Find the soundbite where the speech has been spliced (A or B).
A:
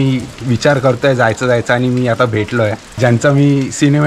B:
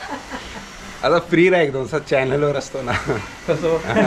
A